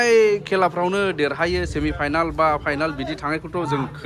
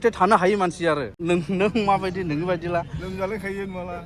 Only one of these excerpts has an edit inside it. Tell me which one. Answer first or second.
second